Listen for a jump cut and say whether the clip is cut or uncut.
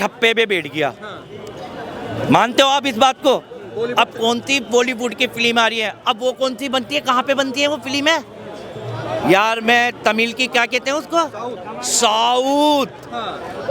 uncut